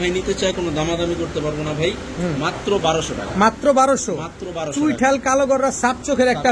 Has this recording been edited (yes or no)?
no